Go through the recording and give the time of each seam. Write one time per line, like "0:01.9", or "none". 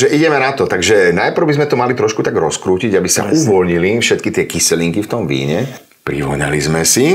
0:05.9